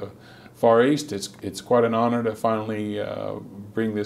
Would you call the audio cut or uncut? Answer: cut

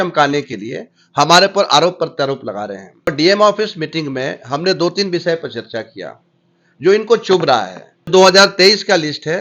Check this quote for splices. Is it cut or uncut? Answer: cut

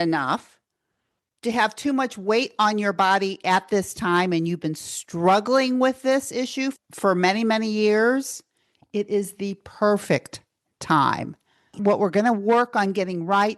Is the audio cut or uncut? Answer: cut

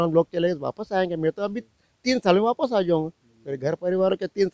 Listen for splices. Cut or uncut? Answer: uncut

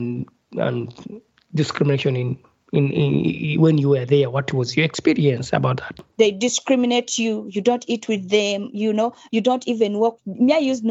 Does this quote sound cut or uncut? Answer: cut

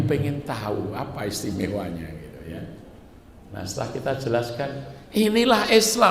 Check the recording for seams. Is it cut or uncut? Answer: uncut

